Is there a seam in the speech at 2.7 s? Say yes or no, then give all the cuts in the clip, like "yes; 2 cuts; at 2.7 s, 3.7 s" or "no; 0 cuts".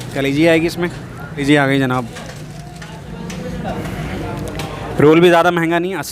no; 2 cuts; at 1.4 s, 4.1 s